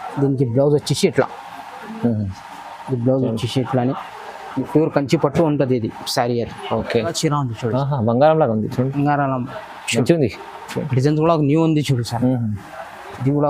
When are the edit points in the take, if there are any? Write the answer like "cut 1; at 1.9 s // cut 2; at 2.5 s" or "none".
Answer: cut 1; at 7.1 s